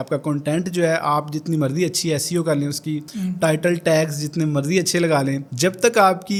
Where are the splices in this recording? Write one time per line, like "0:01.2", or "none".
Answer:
none